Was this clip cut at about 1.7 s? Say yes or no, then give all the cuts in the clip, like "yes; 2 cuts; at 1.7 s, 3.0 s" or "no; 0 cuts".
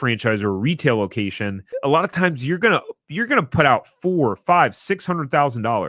yes; 1 cut; at 1.7 s